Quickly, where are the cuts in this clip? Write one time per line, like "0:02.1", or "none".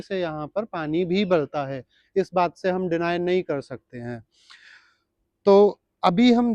none

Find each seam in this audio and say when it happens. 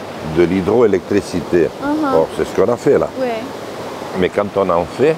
none

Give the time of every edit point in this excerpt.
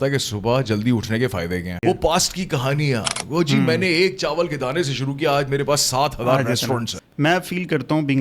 0:01.8
0:06.9

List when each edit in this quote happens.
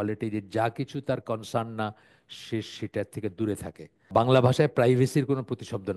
0:04.1

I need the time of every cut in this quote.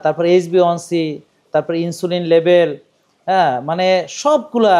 none

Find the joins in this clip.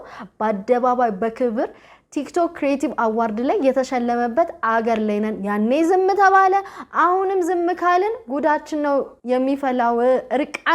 0:09.1

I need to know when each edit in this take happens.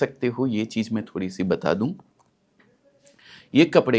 none

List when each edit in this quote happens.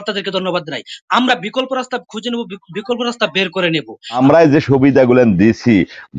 0:04.2

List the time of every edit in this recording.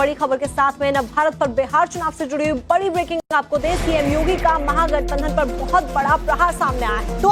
none

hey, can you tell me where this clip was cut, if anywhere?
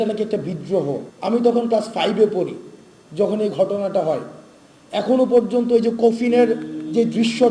0:01.1

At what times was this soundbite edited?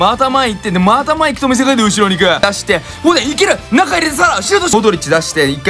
0:02.4
0:04.7

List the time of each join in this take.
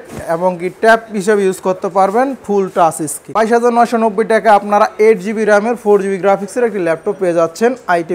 0:03.2

